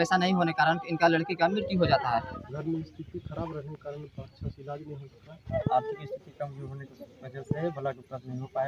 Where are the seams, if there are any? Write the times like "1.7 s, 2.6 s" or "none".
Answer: 2.4 s, 5.5 s